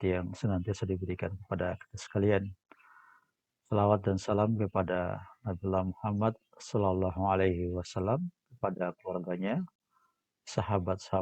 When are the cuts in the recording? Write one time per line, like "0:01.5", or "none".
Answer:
none